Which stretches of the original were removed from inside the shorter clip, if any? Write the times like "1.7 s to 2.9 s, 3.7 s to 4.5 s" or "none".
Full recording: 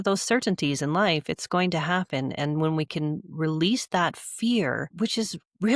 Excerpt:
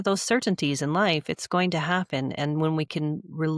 none